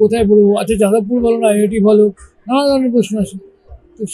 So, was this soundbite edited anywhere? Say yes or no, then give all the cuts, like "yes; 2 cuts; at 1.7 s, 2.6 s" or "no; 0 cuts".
no; 0 cuts